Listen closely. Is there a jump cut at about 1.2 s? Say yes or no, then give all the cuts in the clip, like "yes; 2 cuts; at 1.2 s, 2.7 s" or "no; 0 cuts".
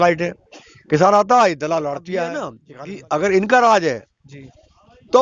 no; 1 cut; at 2.6 s